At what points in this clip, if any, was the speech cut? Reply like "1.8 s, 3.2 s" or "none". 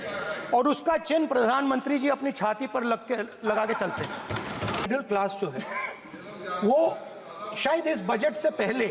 4.9 s